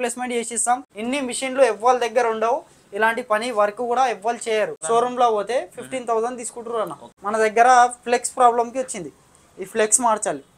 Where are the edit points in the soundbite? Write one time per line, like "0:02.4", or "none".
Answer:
0:00.9
0:04.8
0:07.1